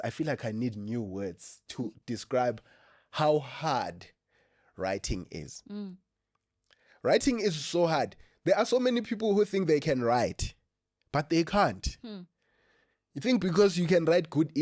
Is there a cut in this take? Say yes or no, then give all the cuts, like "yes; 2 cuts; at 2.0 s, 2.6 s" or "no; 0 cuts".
no; 0 cuts